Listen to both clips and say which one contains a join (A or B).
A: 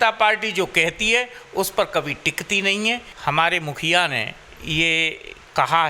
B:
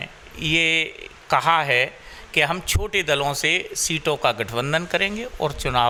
A